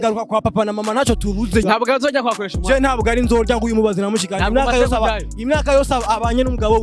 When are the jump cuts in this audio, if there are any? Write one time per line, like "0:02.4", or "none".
0:01.6